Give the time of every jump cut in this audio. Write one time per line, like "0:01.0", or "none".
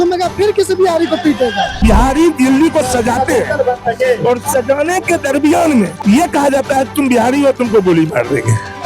0:01.8
0:05.9